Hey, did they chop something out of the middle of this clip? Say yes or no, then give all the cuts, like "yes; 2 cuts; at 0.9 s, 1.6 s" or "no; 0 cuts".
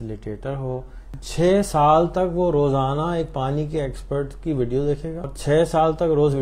yes; 2 cuts; at 1.1 s, 5.3 s